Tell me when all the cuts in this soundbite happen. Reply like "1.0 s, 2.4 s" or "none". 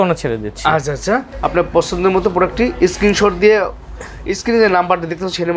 none